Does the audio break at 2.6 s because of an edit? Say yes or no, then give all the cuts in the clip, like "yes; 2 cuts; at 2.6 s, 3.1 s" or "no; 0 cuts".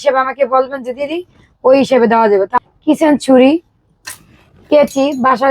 yes; 1 cut; at 2.6 s